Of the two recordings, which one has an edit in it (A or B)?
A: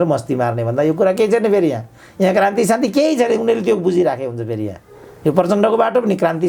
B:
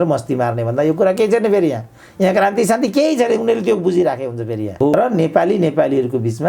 B